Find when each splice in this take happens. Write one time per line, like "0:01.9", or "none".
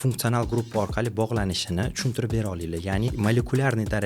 0:03.1